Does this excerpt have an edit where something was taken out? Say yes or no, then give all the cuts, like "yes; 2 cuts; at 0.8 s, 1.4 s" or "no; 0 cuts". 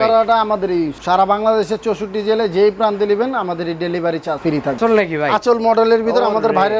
yes; 2 cuts; at 1.0 s, 4.7 s